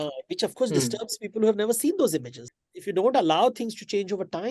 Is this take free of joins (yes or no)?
no